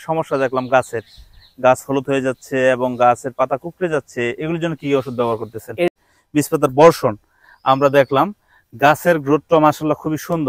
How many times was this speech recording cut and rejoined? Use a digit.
1